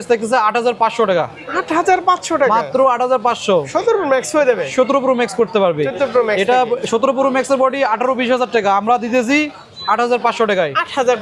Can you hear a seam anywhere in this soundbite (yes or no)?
no